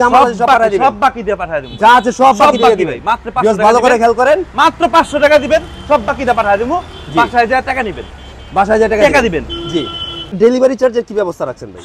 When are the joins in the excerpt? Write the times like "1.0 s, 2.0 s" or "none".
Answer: 10.2 s